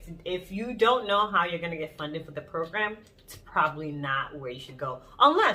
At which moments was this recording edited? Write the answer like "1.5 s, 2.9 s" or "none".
none